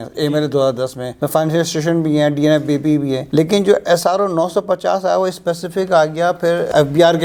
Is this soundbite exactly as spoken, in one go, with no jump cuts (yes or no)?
yes